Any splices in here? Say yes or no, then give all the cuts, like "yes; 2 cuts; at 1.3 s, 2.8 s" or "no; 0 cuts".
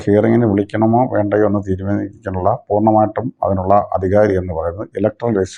no; 0 cuts